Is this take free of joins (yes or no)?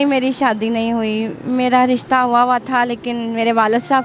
yes